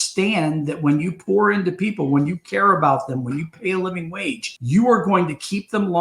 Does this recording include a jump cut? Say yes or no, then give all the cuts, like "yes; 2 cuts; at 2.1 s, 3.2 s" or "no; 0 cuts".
yes; 1 cut; at 4.5 s